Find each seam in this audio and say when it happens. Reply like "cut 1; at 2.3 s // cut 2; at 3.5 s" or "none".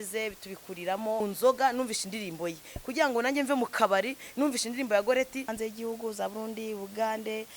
cut 1; at 1.2 s // cut 2; at 5.5 s